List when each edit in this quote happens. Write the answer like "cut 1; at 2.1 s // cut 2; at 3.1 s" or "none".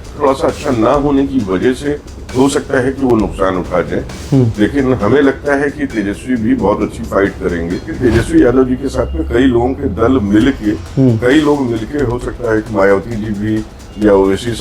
cut 1; at 7.9 s